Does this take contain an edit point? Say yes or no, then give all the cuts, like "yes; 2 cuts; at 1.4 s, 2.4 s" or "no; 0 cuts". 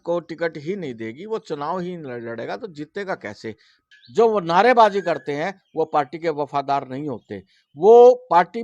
yes; 1 cut; at 3.7 s